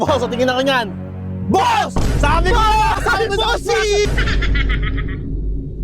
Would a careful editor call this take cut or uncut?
cut